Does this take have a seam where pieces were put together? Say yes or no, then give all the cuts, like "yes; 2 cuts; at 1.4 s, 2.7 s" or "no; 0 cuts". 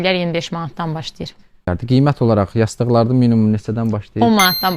yes; 1 cut; at 1.6 s